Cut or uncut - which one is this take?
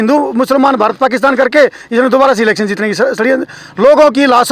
uncut